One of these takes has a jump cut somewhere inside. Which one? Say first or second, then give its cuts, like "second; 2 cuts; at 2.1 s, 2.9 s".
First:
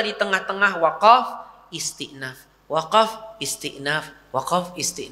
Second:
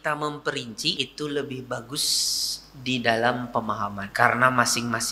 second; 2 cuts; at 1.0 s, 4.0 s